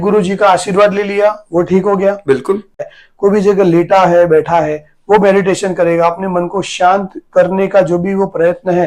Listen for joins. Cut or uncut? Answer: cut